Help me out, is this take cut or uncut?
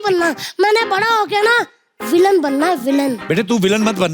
cut